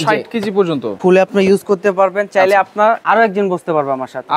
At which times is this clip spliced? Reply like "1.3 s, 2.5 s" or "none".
1.0 s, 3.0 s